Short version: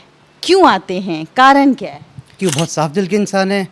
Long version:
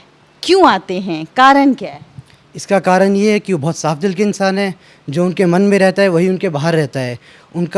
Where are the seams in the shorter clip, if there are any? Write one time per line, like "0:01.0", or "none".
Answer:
0:02.4

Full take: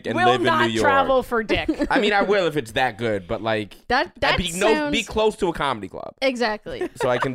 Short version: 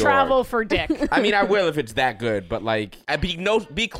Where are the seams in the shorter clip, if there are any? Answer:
0:03.0

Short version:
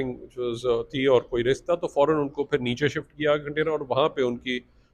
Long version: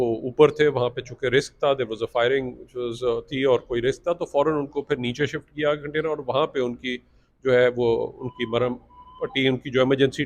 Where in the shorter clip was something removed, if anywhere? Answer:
none

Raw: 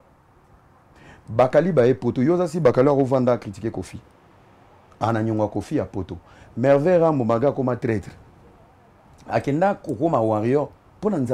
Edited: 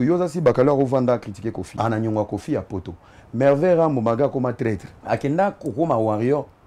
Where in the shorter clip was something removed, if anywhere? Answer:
0:01.7
0:04.9

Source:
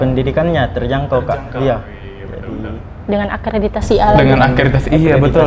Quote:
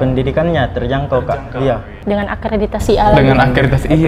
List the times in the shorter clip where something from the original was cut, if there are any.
0:01.9

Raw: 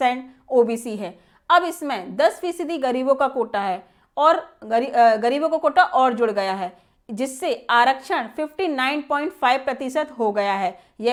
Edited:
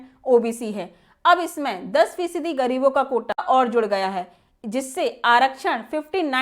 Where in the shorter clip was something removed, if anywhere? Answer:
0:03.4

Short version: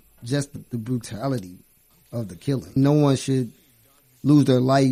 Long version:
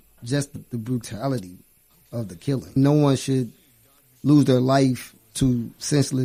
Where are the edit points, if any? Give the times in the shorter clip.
none

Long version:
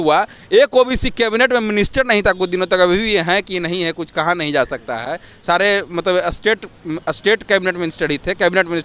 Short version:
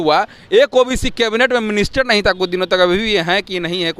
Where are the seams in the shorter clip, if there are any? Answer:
none

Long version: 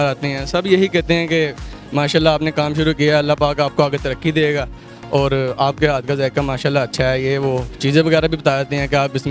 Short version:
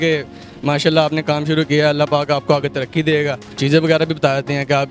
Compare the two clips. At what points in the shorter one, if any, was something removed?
0:03.5

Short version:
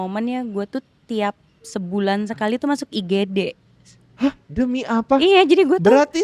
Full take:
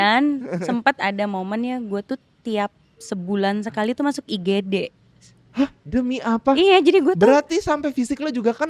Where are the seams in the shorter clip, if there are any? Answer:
none

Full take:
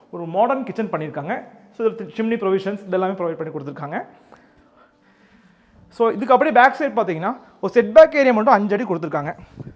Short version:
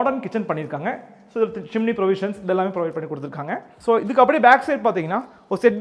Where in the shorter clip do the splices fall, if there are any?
0:03.7

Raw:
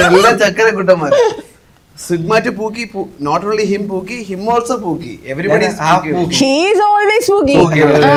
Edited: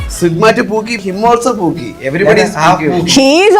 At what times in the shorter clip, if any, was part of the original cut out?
0:01.0

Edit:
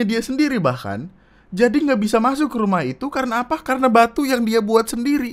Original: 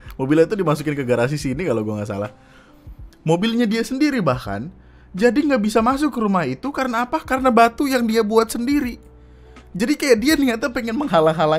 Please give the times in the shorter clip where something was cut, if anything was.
none

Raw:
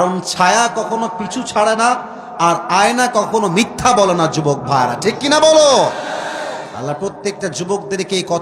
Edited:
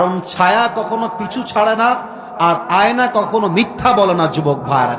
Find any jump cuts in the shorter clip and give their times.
none

